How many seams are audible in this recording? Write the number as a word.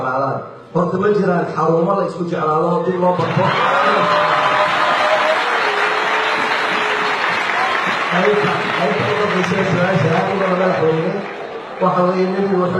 one